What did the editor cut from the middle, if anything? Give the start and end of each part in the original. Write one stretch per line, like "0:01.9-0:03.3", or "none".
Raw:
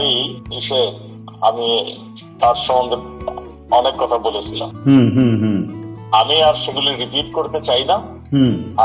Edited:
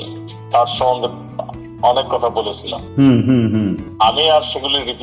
0:05.7-0:06.0